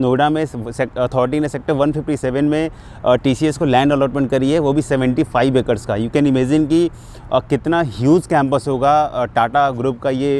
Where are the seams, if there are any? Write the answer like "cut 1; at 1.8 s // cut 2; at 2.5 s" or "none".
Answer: none